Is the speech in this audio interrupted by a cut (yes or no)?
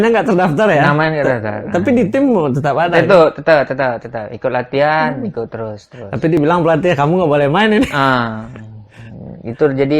no